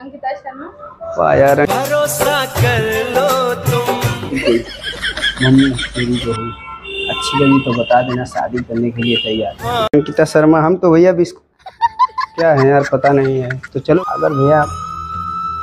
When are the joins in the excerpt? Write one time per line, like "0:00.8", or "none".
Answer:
0:04.3
0:09.6
0:14.0